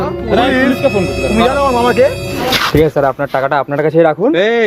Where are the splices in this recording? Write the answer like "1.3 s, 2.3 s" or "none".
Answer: 2.3 s